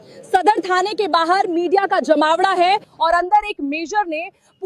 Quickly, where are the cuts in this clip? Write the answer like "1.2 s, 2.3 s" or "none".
2.9 s